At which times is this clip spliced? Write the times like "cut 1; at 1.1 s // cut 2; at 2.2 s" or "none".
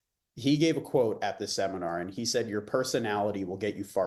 none